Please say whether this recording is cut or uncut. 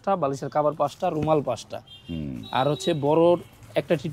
uncut